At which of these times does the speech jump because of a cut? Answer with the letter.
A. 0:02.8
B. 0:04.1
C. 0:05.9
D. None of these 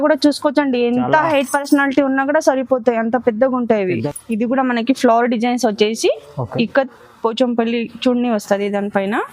B